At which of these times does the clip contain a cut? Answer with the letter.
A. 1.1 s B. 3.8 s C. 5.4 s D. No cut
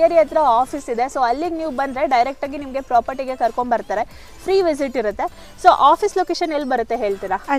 D